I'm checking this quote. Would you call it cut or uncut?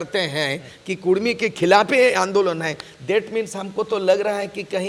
uncut